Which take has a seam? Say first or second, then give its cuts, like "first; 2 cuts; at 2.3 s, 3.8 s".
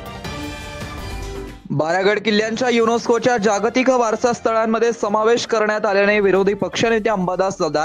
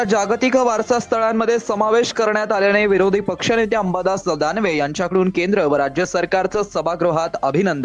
first; 1 cut; at 1.0 s